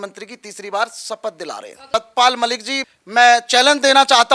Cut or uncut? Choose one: cut